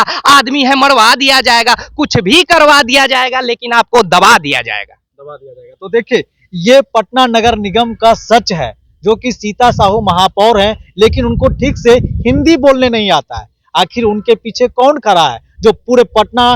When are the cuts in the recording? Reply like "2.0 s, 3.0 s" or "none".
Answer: none